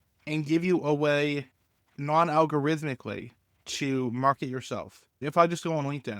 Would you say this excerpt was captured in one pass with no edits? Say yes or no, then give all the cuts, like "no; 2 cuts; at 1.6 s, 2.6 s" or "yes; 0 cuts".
no; 1 cut; at 5.2 s